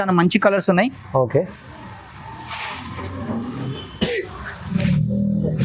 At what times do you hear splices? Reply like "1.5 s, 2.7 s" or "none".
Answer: none